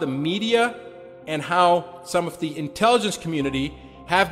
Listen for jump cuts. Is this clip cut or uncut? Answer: uncut